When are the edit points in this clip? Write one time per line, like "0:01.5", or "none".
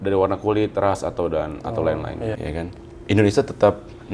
0:02.4